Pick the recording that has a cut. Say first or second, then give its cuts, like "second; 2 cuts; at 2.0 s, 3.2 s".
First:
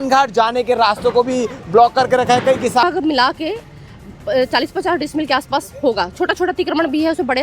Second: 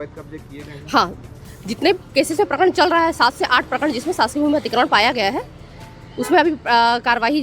first; 1 cut; at 2.8 s